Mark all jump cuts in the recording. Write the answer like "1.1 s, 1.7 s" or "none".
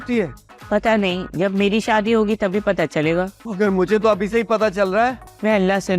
none